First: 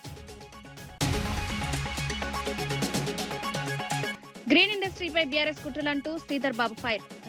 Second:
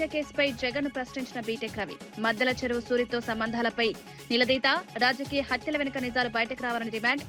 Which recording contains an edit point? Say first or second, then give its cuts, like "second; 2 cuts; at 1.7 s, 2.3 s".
first; 3 cuts; at 0.9 s, 2.5 s, 4.2 s